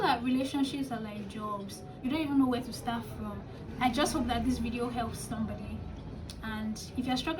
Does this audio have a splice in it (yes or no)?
yes